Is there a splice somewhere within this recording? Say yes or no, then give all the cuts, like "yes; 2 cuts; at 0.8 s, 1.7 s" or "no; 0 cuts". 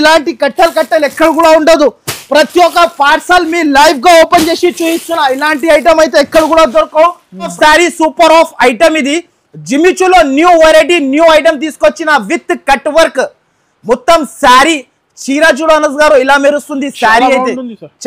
yes; 1 cut; at 7.5 s